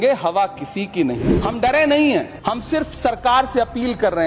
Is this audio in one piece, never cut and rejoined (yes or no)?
no